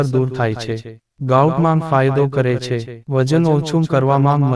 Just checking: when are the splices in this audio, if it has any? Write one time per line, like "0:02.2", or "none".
none